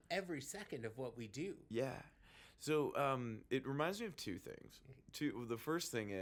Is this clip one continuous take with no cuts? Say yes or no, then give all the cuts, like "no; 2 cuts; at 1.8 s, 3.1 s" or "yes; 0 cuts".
yes; 0 cuts